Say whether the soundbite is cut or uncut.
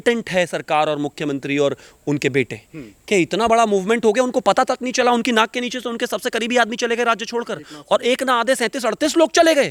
uncut